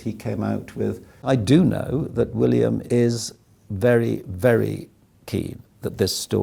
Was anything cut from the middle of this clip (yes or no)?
yes